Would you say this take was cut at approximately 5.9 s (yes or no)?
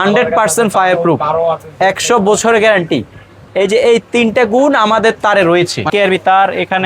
yes